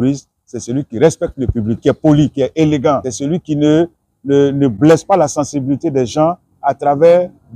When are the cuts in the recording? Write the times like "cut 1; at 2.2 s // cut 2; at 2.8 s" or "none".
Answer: cut 1; at 1.8 s // cut 2; at 3.1 s